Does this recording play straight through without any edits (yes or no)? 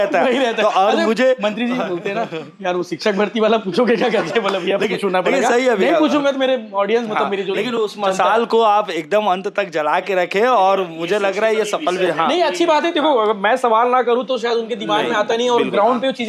yes